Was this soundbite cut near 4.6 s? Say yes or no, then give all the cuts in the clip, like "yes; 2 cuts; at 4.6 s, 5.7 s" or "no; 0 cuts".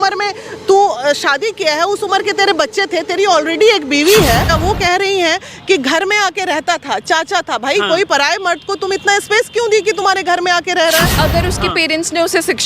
yes; 2 cuts; at 4.6 s, 11.1 s